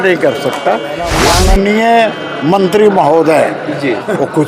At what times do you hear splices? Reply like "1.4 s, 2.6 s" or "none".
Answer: 1.1 s